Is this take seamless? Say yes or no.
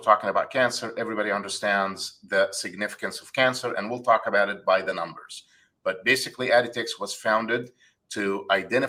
yes